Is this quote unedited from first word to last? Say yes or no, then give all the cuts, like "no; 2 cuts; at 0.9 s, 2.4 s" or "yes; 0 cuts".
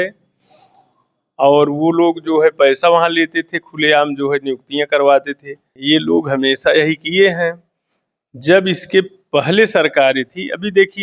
no; 1 cut; at 5.8 s